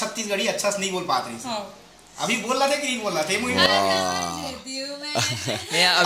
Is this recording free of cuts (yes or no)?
yes